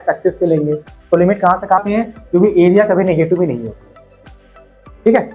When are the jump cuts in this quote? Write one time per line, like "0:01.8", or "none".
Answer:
0:01.8